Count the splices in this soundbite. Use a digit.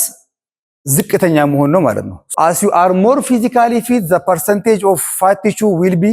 1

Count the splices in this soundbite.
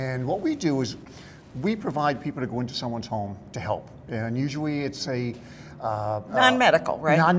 1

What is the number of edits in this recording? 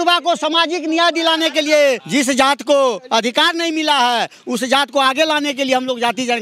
1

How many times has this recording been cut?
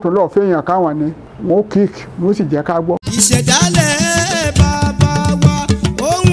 2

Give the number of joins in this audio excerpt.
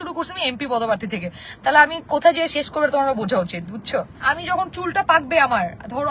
1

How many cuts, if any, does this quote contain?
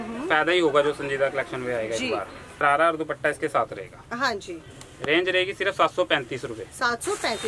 1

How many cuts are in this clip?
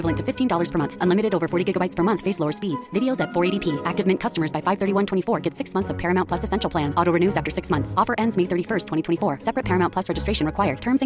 0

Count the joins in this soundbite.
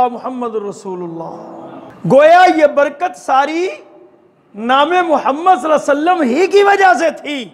1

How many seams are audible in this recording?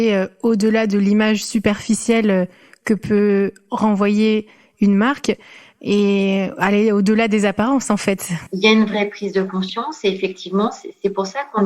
1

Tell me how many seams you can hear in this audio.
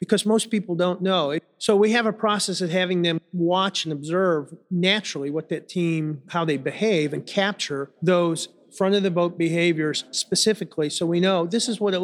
5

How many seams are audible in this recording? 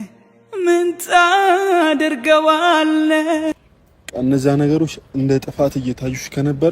1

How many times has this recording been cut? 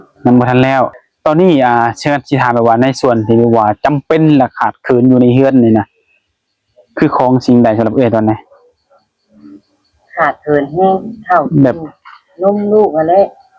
1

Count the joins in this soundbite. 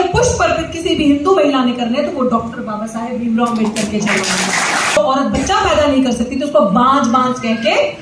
1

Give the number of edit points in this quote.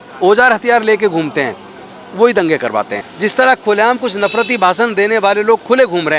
1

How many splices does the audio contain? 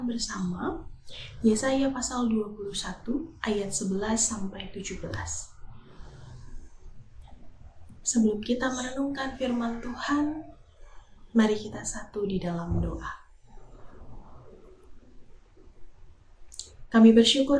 1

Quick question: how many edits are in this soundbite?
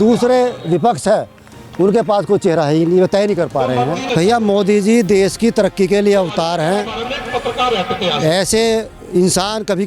1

